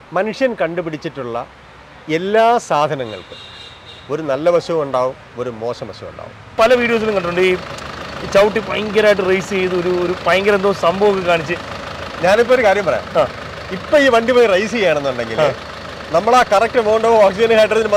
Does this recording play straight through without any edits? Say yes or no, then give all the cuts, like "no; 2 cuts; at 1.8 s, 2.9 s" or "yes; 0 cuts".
no; 1 cut; at 6.5 s